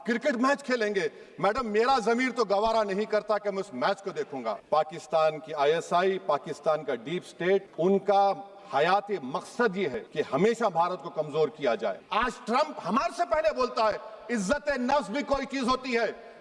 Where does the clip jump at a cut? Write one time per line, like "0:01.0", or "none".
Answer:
0:04.6
0:12.0

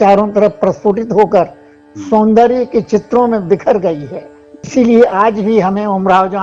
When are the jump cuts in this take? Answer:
0:04.5

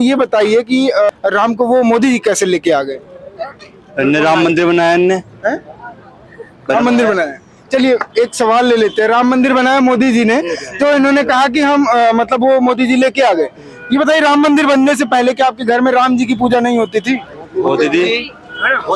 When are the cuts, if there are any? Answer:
none

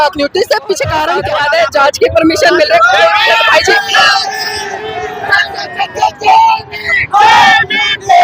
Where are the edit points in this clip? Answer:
0:01.2
0:04.1

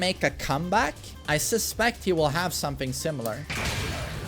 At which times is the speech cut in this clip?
0:01.1

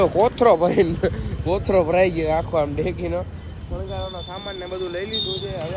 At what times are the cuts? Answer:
none

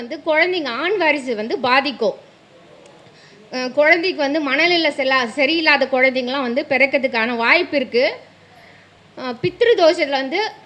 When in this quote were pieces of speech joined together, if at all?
none

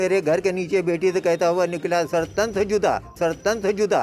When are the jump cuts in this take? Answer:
0:03.1

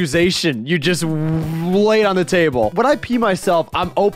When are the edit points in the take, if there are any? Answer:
0:02.7

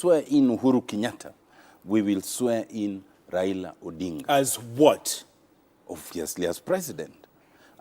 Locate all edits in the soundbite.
none

